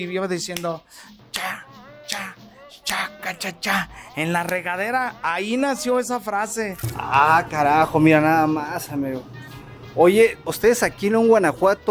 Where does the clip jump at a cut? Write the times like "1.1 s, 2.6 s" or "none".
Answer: 6.8 s, 10.5 s